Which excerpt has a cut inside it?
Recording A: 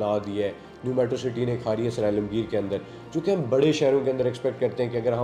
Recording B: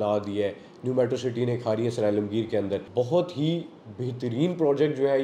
B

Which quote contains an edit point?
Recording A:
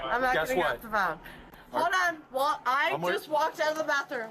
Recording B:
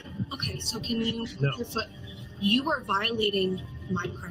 A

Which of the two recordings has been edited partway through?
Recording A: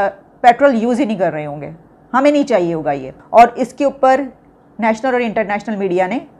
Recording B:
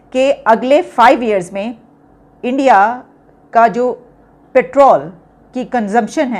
A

